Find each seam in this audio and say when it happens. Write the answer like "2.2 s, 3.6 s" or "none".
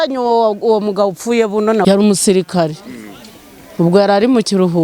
1.8 s